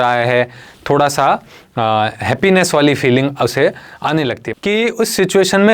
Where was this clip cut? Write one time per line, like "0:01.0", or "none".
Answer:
0:04.4

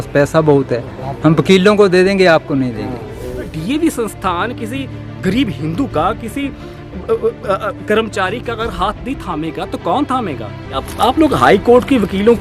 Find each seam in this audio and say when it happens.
0:03.6
0:10.9

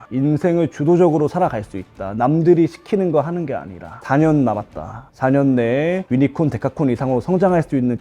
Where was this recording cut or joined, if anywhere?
0:04.0

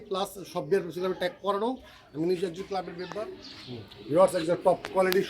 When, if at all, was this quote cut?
0:03.2

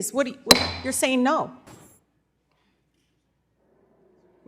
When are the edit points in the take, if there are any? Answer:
0:01.6

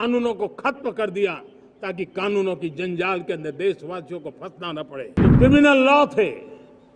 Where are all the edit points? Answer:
0:05.2

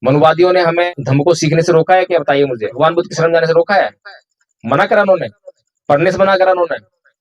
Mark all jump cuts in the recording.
0:00.9
0:02.7

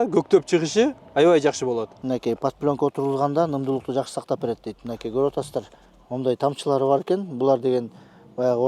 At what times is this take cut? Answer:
0:01.9

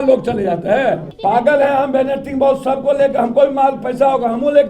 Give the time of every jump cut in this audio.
0:01.1

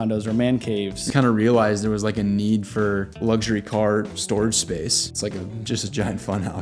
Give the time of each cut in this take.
0:01.0
0:03.1
0:05.1

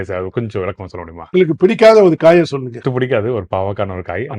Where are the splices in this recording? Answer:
0:02.7

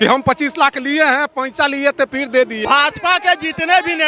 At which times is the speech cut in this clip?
0:02.6

